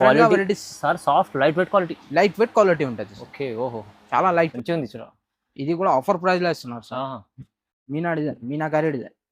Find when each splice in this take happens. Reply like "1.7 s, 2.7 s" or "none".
4.5 s